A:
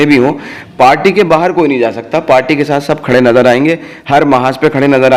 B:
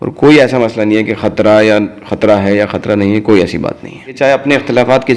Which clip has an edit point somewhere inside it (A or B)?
B